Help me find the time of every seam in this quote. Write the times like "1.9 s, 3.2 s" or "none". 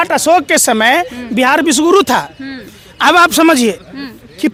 none